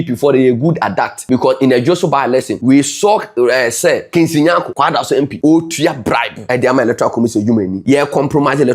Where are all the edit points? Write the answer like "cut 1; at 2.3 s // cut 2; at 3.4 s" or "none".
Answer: cut 1; at 1.2 s // cut 2; at 2.5 s // cut 3; at 4.1 s // cut 4; at 4.8 s // cut 5; at 6.3 s // cut 6; at 7.8 s